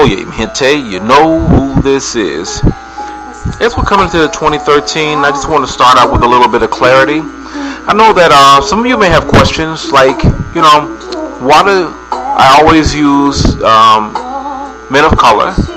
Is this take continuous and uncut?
no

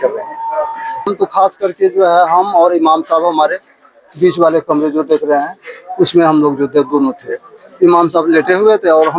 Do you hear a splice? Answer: yes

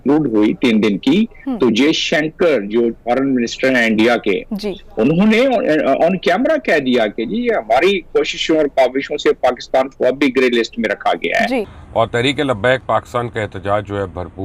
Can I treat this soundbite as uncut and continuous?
no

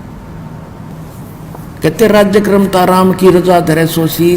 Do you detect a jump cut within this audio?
yes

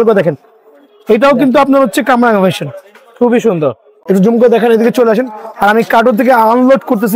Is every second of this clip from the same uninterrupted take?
yes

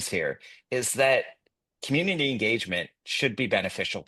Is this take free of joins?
yes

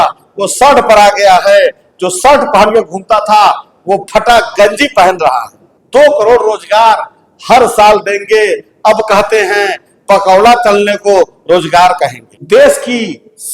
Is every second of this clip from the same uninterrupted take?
yes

